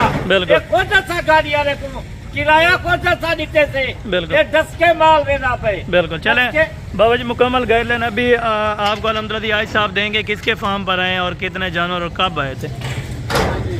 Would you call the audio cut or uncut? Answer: uncut